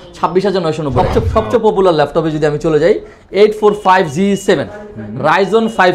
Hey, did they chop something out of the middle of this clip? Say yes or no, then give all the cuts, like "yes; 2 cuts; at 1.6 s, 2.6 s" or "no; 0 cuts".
yes; 1 cut; at 1.0 s